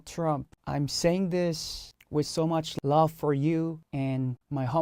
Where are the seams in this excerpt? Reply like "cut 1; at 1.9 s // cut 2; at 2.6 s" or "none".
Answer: none